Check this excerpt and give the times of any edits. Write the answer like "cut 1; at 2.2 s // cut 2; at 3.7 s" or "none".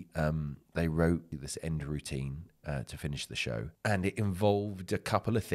cut 1; at 1.4 s // cut 2; at 3.7 s